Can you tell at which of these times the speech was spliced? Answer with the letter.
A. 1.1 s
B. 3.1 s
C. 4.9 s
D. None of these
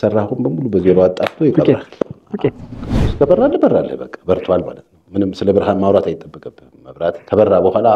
B